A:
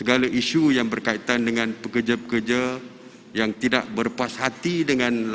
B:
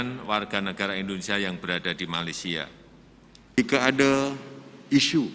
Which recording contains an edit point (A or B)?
B